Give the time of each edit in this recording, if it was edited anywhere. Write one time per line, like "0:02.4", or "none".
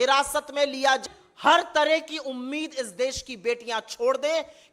0:01.0